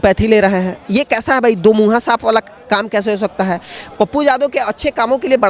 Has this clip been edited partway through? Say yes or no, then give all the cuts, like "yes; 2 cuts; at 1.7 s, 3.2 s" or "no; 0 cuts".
no; 0 cuts